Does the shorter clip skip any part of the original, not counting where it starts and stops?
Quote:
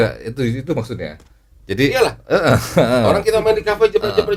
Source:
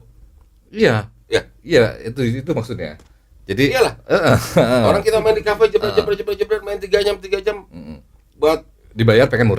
no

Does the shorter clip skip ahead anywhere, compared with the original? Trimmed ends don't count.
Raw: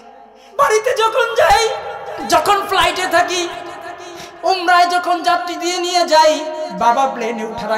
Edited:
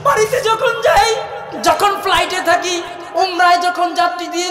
yes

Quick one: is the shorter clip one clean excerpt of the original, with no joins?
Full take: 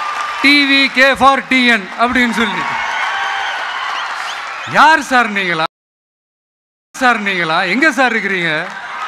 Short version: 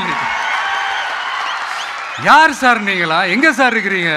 no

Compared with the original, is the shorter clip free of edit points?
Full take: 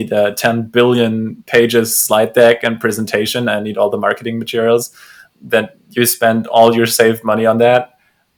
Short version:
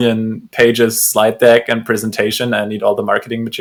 yes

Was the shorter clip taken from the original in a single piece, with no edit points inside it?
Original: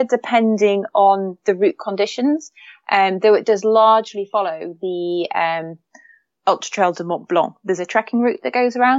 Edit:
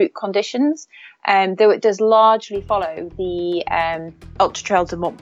no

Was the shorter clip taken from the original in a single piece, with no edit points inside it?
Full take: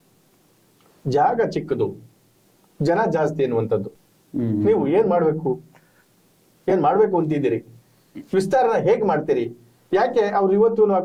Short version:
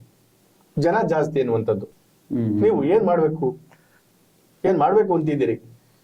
yes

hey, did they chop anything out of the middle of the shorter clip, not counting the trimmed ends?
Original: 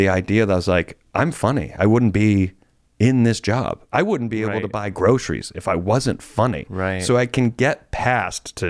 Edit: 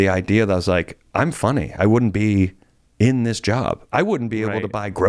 no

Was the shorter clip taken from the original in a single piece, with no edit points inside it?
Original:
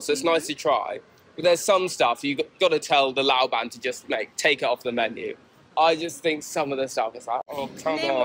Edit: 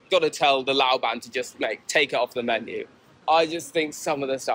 yes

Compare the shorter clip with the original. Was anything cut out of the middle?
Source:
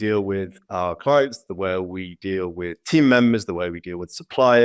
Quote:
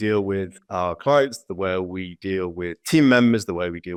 no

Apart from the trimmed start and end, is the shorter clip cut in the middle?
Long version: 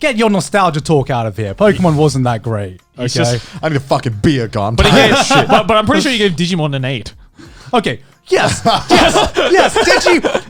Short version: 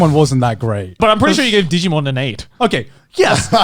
yes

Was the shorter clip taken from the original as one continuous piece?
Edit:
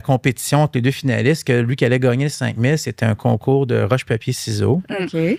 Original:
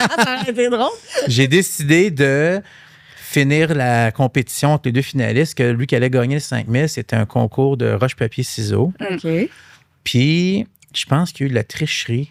yes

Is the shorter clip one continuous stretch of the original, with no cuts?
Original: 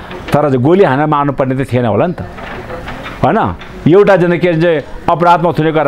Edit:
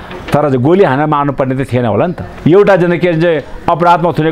no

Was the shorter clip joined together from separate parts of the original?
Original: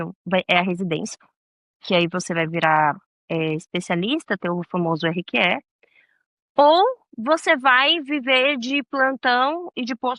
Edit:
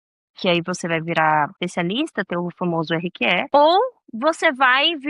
yes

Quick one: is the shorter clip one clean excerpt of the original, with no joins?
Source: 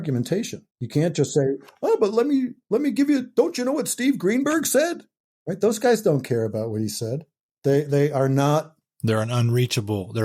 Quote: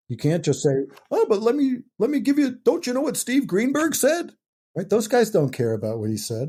yes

